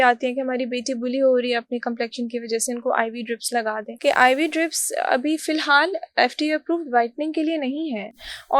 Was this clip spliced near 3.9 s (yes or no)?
yes